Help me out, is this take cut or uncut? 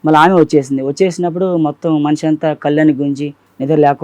uncut